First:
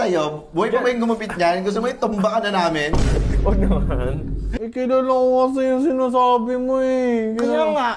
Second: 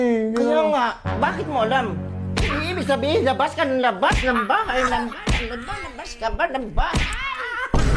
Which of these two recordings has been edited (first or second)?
first